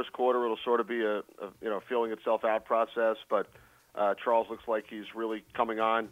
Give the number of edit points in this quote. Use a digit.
0